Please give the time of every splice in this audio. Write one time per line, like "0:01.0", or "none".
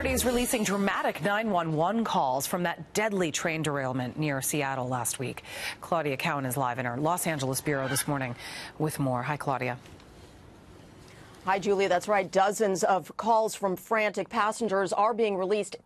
none

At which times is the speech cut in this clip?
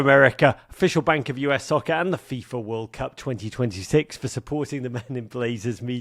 none

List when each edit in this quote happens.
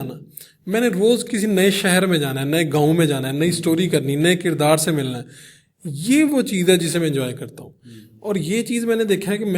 none

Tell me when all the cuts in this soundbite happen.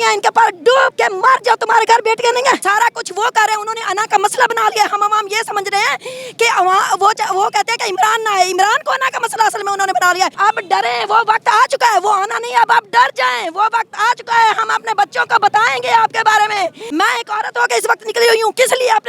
0:00.9
0:02.6
0:10.3
0:16.8

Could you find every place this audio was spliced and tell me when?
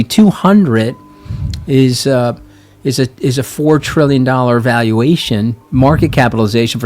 0:05.6

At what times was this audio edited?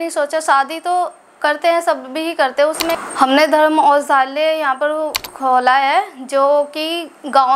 0:03.0
0:05.3

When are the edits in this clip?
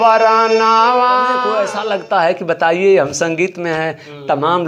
0:01.6

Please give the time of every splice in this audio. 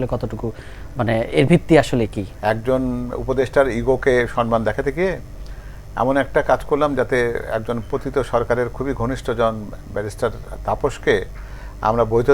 0:02.2

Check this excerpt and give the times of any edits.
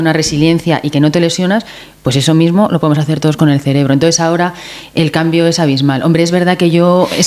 none

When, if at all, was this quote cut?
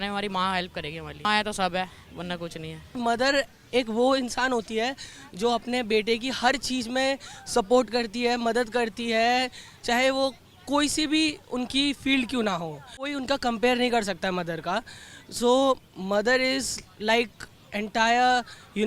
0:01.2
0:02.9
0:13.1

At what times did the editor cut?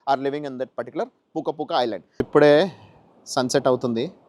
0:02.1

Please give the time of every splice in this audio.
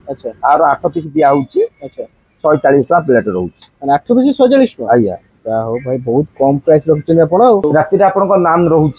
0:07.7

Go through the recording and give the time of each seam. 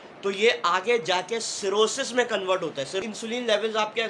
0:03.0

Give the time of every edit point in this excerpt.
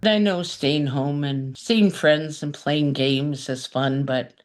0:01.5

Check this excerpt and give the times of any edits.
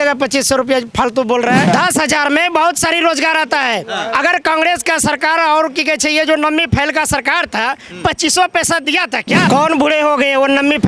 0:01.7
0:09.5

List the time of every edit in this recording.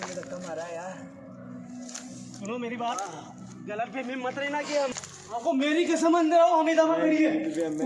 0:04.9

